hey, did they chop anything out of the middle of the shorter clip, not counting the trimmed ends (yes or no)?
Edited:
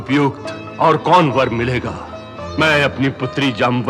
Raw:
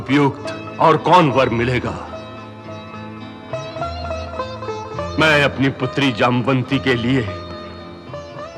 yes